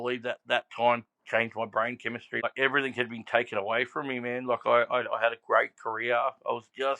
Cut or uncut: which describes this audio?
cut